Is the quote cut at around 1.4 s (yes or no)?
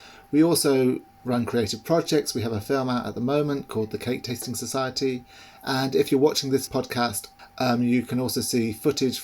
no